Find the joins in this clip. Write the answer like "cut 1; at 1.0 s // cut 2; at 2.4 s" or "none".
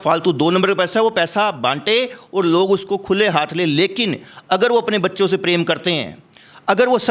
none